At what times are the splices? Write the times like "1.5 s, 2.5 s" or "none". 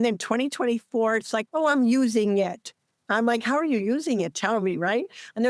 1.4 s